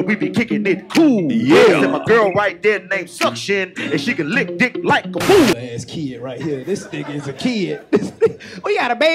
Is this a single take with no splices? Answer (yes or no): no